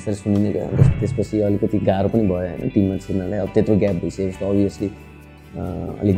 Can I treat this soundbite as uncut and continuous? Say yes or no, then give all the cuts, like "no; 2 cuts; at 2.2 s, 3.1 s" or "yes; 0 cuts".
no; 1 cut; at 0.9 s